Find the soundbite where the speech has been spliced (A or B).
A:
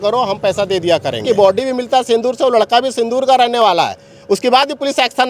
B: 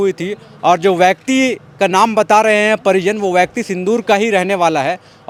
A